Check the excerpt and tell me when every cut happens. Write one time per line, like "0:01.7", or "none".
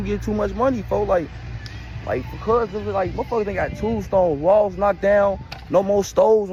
none